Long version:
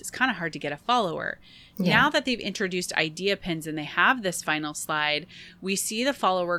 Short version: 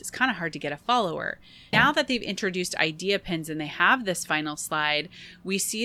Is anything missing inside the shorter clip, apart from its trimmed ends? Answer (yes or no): yes